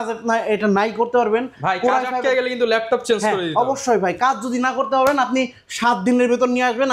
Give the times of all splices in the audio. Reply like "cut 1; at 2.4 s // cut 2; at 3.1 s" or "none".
none